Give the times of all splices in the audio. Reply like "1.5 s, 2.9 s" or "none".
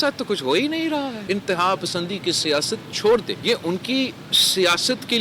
1.2 s, 3.3 s